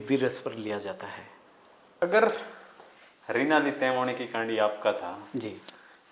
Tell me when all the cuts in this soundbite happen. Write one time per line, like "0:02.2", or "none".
0:02.0